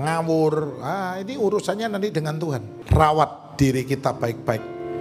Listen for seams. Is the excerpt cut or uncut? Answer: cut